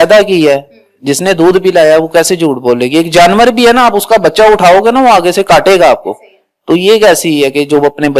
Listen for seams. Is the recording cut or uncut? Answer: uncut